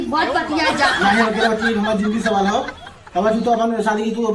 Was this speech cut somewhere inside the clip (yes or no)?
no